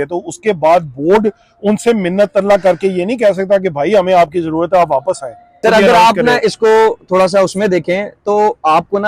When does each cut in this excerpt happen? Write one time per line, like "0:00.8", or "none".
0:05.6

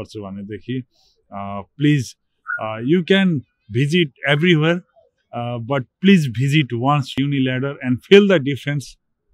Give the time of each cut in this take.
0:07.2

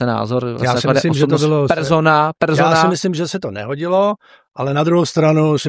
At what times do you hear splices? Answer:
none

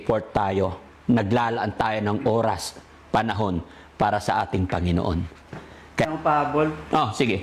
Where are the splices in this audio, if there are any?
0:06.1

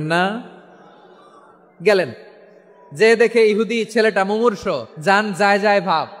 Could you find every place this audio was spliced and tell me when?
0:04.9

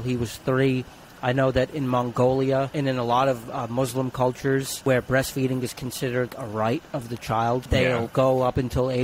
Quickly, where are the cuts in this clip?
0:02.7
0:04.7
0:06.3
0:07.6

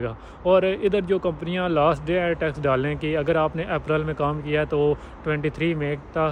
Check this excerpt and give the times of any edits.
none

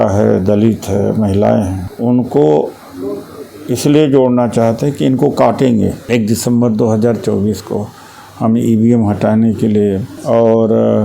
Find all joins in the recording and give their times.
0:01.8
0:06.0
0:10.1

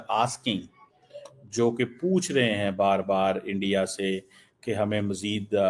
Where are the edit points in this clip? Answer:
none

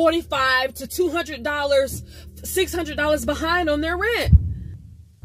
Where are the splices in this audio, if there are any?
0:04.2

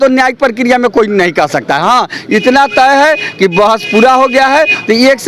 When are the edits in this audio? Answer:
none

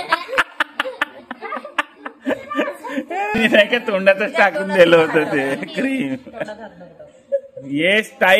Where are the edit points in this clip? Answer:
0:03.4

